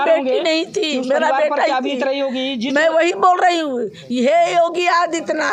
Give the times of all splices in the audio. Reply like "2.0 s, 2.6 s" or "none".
none